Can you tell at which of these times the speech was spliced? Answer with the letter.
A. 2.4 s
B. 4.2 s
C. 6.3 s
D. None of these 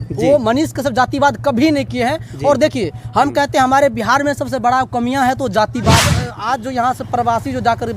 C